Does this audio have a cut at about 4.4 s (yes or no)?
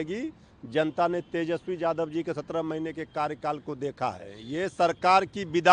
yes